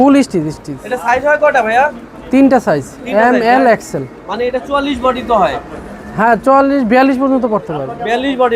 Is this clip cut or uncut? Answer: uncut